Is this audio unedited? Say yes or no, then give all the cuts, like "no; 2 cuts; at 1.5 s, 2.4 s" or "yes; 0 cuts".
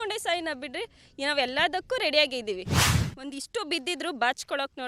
yes; 0 cuts